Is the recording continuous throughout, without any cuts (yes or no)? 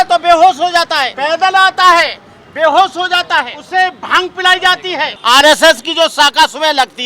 no